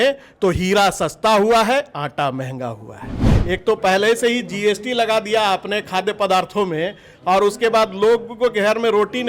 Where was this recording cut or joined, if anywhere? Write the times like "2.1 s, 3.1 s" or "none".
3.3 s